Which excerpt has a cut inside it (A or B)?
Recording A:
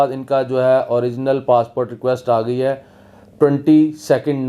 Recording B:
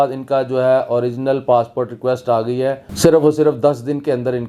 B